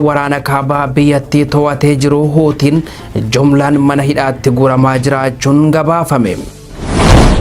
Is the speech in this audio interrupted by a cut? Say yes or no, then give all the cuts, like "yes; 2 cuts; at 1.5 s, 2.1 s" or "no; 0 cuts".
yes; 1 cut; at 6.5 s